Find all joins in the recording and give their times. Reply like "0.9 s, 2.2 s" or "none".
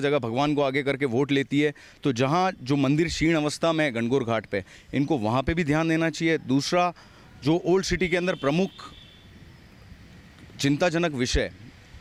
none